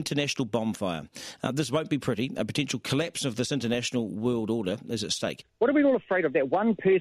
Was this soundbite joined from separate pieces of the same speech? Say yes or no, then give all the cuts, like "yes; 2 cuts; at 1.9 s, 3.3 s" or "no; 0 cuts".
yes; 1 cut; at 5.4 s